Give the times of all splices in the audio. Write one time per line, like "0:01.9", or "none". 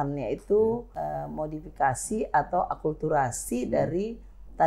0:00.9